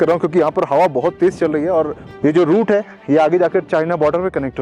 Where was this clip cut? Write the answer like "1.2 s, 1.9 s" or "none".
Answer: 2.0 s

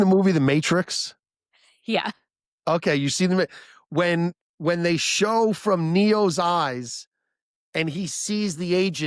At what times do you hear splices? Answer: none

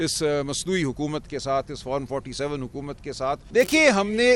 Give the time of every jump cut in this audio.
3.4 s

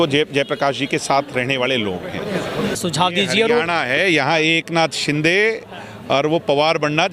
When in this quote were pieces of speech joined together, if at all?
2.8 s

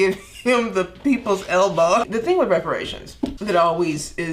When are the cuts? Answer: 2.0 s, 3.4 s

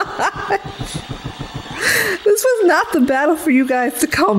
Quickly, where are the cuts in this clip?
none

